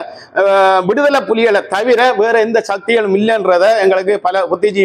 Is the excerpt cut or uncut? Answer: uncut